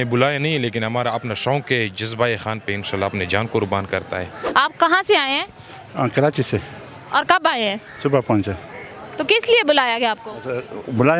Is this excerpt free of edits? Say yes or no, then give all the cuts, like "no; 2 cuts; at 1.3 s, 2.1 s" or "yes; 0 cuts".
yes; 0 cuts